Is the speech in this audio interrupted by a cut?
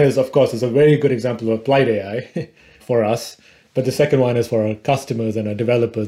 no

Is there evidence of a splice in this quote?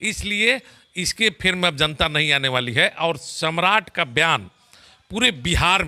no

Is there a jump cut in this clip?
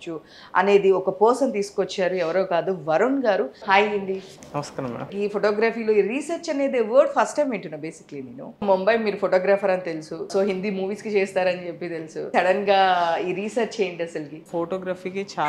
yes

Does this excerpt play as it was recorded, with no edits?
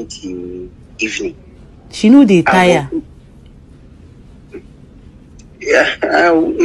yes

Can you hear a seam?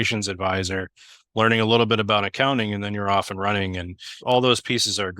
yes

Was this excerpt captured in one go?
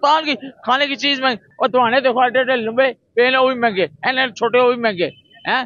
no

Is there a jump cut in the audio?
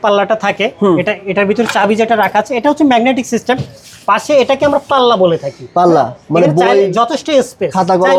no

